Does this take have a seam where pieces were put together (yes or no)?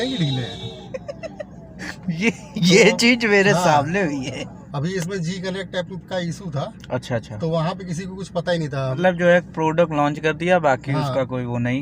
yes